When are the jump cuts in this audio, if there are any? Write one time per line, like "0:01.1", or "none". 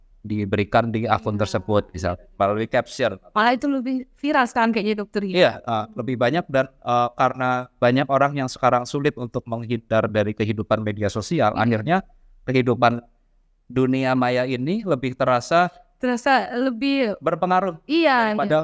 none